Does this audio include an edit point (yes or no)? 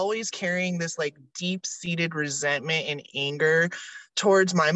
no